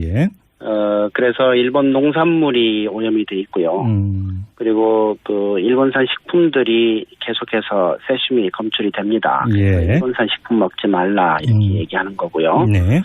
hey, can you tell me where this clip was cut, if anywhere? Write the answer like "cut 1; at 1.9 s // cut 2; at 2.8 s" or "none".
cut 1; at 7.4 s